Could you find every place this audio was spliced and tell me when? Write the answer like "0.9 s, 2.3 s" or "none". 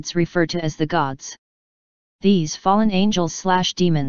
1.6 s